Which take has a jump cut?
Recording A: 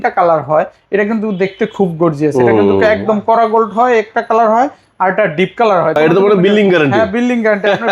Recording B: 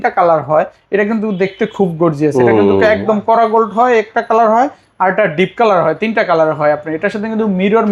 A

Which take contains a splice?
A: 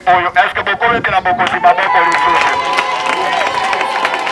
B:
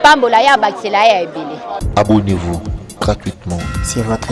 B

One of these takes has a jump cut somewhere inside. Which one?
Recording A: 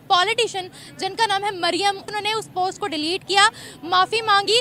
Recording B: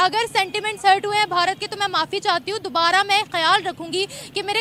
A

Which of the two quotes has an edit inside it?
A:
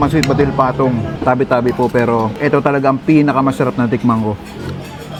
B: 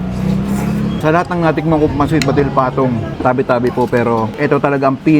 B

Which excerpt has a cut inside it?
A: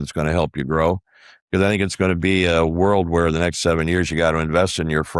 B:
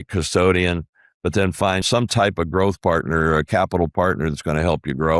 B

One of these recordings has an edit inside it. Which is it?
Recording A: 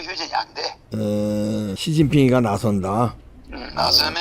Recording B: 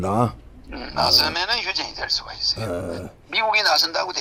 A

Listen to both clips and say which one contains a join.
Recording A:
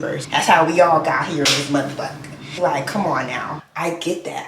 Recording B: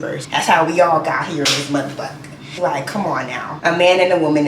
A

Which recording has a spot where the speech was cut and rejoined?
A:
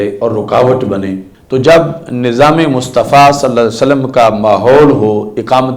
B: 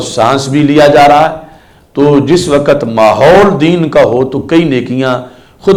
A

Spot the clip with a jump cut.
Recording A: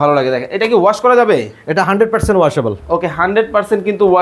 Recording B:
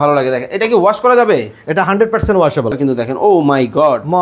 B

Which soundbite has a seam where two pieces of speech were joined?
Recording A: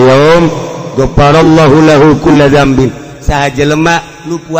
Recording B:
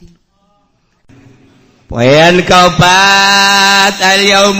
B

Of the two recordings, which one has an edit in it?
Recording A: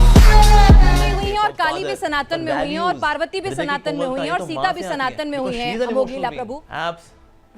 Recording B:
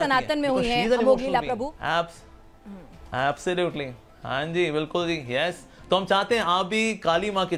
A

